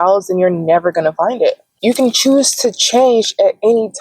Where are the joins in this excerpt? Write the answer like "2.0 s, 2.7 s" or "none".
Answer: 1.7 s